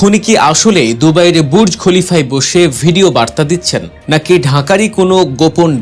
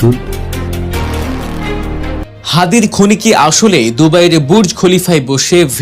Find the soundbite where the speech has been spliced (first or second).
second